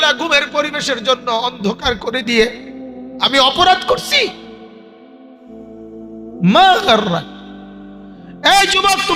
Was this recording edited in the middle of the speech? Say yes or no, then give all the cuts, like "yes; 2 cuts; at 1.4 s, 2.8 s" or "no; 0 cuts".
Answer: no; 0 cuts